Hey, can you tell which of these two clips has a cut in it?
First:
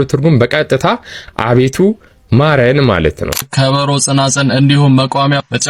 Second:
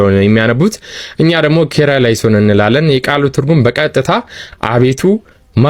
first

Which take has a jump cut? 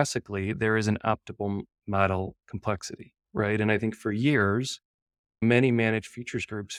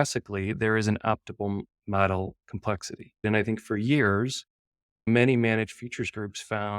second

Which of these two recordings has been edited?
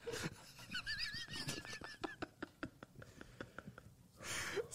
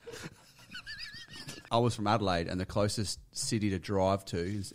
second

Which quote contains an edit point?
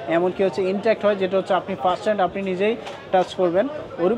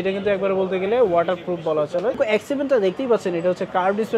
second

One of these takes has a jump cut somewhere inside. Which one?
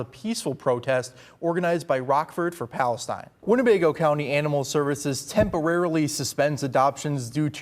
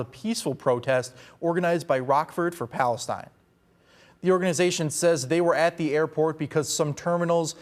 first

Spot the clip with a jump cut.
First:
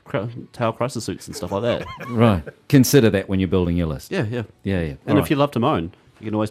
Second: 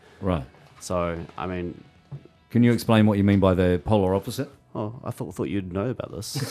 first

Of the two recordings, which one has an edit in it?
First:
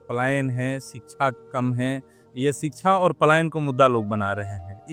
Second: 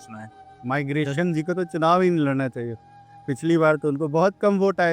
second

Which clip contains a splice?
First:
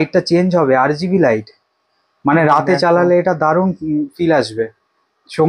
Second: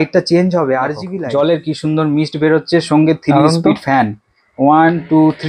second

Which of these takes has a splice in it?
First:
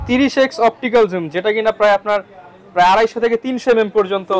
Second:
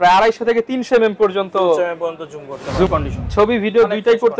second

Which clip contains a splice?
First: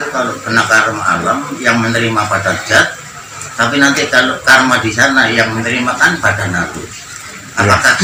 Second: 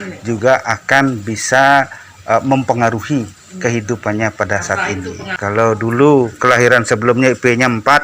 second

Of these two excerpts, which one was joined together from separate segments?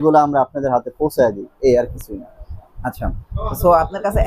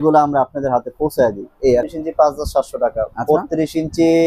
second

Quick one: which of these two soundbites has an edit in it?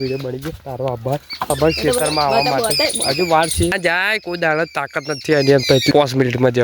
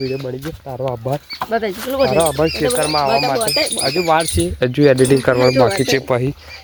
first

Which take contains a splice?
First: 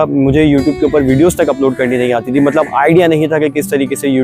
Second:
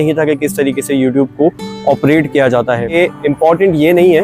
second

